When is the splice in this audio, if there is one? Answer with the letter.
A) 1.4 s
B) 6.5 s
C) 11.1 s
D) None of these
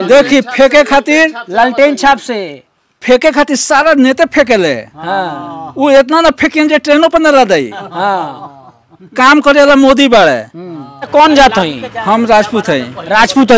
C